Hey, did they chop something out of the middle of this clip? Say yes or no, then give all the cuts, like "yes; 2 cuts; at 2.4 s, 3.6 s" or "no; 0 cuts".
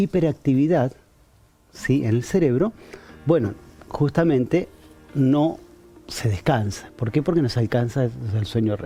no; 0 cuts